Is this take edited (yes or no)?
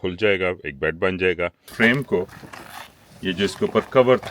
yes